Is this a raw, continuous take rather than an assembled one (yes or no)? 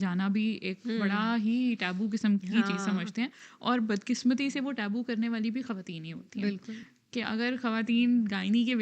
yes